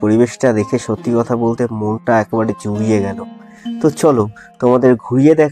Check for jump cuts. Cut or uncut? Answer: uncut